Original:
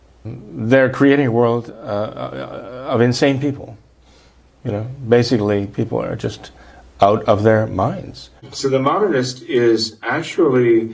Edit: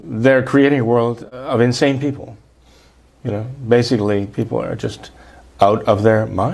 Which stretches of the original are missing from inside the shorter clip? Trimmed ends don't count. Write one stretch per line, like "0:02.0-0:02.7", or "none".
0:01.8-0:02.7